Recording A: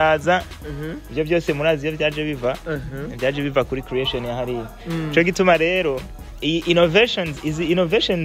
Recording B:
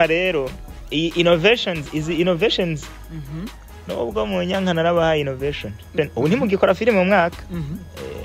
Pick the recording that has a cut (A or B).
B